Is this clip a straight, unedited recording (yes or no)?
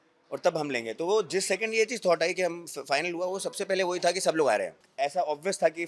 no